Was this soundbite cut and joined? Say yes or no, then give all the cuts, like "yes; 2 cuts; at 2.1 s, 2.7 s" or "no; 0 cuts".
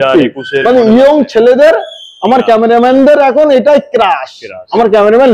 no; 0 cuts